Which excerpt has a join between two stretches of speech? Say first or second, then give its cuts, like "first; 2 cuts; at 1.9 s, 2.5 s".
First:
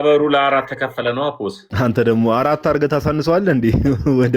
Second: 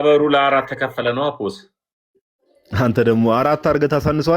first; 1 cut; at 1.6 s